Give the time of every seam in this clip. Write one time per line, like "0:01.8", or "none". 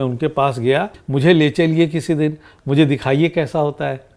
0:01.0